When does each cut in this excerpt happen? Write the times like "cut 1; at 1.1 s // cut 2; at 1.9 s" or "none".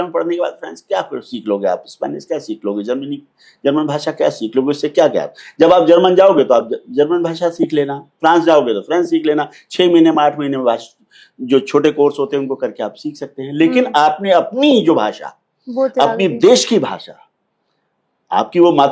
none

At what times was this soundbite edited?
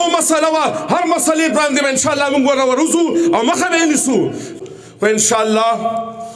cut 1; at 4.6 s

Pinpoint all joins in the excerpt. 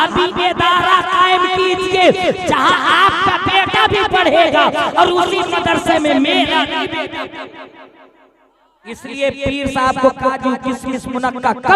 cut 1; at 8.8 s

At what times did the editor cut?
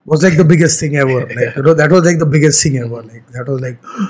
none

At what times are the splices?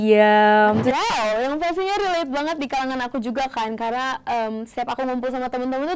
cut 1; at 1.0 s

